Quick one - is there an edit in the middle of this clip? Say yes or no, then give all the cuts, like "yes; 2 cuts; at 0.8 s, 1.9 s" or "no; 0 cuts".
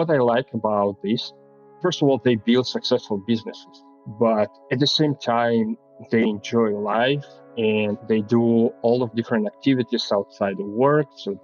yes; 1 cut; at 1.8 s